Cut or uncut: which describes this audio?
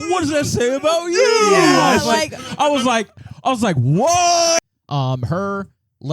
cut